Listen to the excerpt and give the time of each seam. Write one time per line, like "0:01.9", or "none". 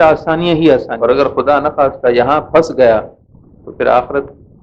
0:00.9